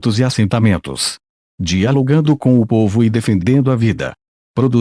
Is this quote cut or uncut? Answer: uncut